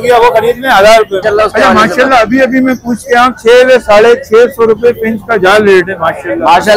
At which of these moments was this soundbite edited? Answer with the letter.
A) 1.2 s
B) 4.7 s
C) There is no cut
A